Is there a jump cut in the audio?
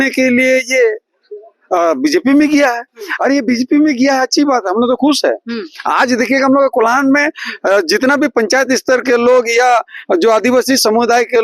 no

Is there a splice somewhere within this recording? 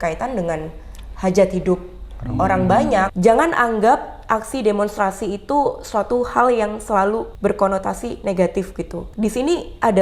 yes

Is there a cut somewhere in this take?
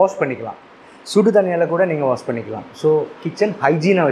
yes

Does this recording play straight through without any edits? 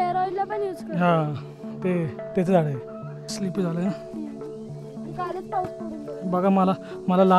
no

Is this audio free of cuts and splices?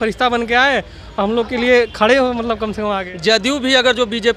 no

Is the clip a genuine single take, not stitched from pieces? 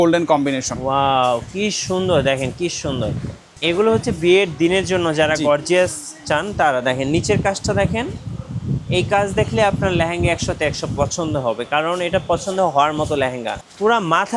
no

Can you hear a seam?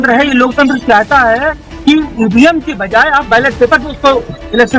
no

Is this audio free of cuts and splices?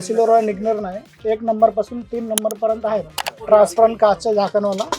no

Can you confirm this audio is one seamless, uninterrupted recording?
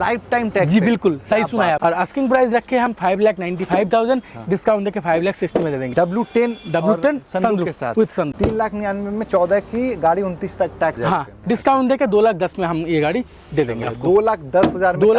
no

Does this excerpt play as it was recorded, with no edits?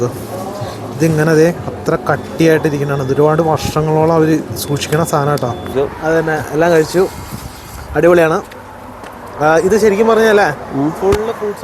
no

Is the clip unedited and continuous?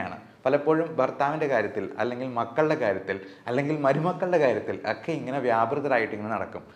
yes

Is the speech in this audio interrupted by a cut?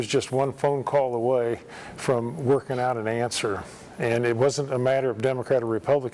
no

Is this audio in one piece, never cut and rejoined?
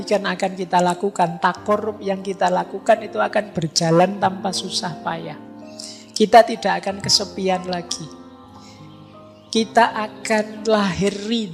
yes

